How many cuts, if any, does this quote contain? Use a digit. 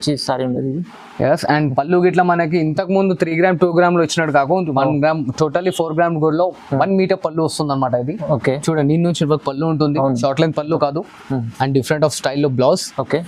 0